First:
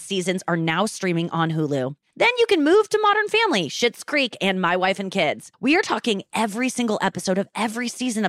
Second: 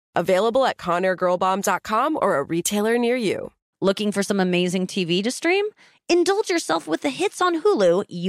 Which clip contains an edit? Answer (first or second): second